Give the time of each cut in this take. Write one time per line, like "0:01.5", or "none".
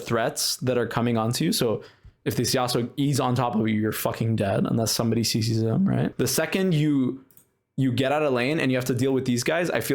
0:06.1